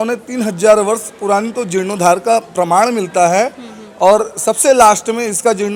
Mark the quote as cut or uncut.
uncut